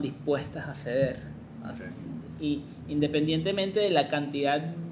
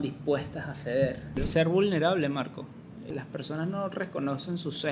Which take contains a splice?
second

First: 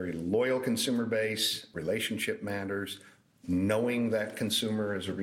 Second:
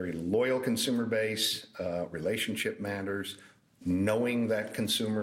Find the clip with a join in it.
first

